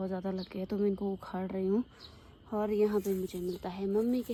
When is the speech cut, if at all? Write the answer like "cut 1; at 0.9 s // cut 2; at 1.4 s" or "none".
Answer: none